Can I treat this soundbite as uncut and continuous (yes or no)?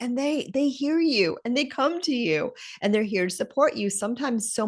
yes